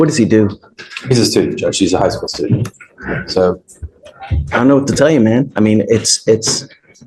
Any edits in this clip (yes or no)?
no